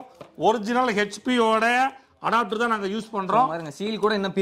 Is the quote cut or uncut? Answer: uncut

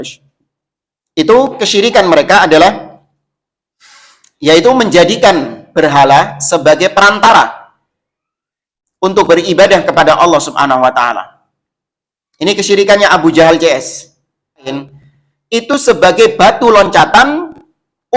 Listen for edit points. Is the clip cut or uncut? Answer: cut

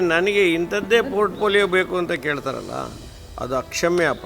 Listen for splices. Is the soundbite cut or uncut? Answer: uncut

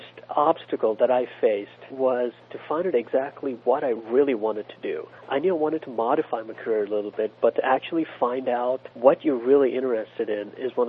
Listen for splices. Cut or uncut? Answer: cut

